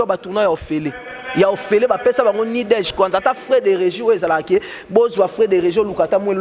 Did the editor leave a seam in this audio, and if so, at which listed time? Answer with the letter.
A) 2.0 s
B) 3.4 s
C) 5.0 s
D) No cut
D